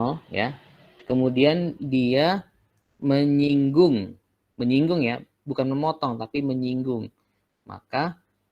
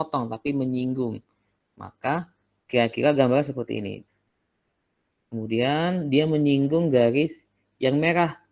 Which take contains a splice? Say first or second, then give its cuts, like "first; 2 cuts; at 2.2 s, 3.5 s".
second; 1 cut; at 4.0 s